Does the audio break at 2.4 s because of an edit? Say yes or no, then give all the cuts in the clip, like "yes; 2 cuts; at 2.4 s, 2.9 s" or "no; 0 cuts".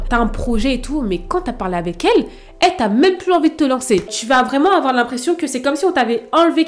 no; 1 cut; at 4.1 s